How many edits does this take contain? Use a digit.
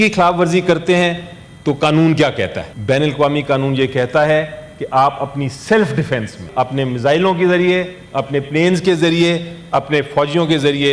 2